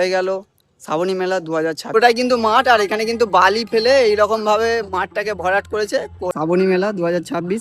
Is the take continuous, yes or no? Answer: no